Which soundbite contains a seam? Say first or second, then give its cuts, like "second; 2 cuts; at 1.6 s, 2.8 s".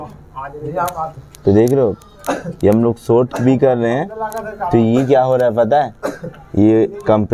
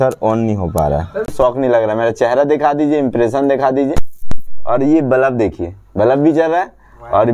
second; 1 cut; at 1.3 s